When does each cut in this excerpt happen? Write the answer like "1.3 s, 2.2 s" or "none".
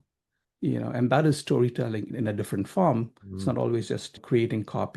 2.1 s, 4.1 s